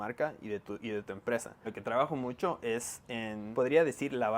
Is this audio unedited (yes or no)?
no